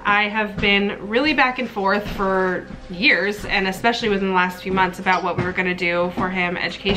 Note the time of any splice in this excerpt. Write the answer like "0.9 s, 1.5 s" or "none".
none